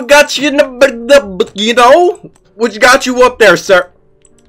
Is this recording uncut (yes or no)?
yes